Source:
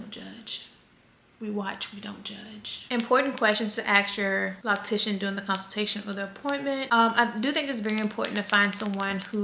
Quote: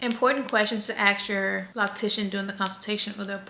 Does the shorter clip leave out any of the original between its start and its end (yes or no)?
no